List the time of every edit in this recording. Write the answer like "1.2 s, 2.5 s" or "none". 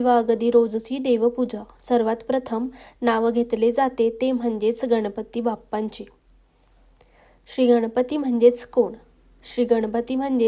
none